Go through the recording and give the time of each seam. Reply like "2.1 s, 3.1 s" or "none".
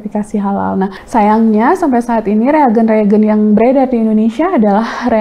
1.0 s